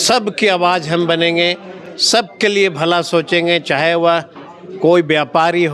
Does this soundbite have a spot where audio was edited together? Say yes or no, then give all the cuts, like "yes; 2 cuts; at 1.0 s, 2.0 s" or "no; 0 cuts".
no; 0 cuts